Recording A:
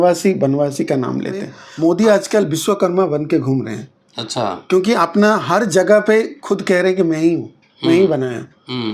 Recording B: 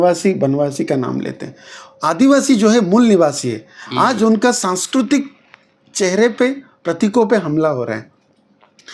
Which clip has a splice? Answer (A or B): A